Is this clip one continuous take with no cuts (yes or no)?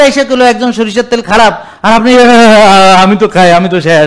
yes